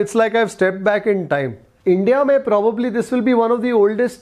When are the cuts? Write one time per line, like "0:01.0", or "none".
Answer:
0:01.6